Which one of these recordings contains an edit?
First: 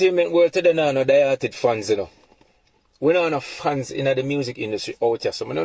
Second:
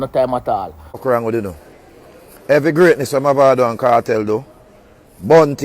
second; 1 cut; at 1.0 s

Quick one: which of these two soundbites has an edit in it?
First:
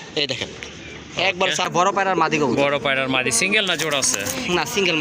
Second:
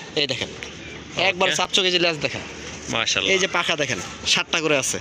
first; 1 cut; at 1.7 s

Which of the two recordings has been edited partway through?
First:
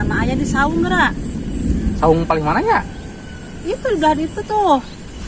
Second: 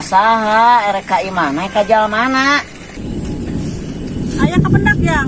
second; 1 cut; at 2.9 s

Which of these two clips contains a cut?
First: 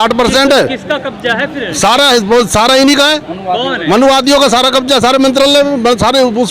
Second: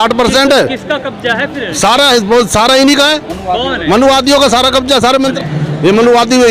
second; 1 cut; at 5.3 s

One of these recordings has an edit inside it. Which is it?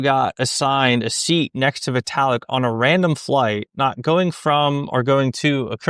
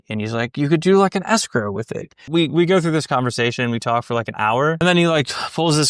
second; 2 cuts; at 2.2 s, 4.8 s

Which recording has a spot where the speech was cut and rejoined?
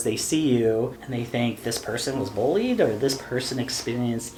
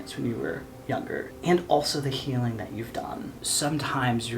second; 2 cuts; at 1.0 s, 3.4 s

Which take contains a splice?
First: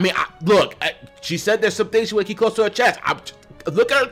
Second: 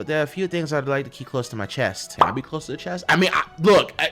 second; 1 cut; at 2.0 s

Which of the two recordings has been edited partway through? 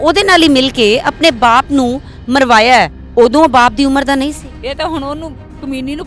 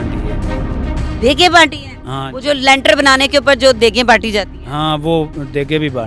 first; 2 cuts; at 3.0 s, 4.5 s

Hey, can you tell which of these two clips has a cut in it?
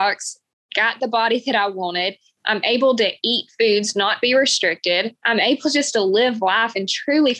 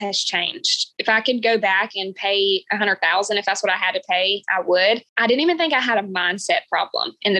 second; 1 cut; at 1.0 s

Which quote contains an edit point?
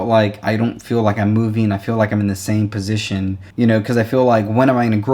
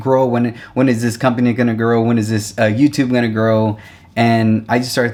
first; 1 cut; at 3.4 s

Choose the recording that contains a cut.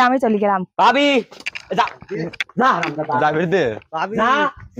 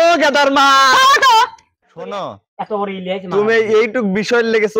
second; 1 cut; at 2.0 s

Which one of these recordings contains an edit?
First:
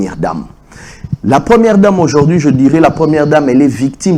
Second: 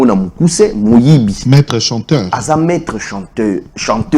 second; 1 cut; at 1.4 s

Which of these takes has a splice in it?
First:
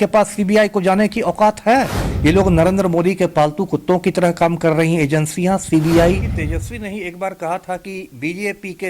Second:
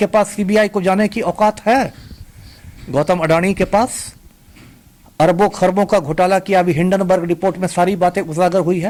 first; 2 cuts; at 2.0 s, 6.3 s

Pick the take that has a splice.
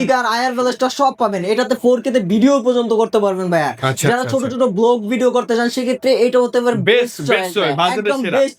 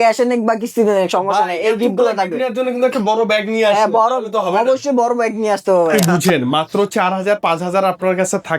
second; 1 cut; at 5.9 s

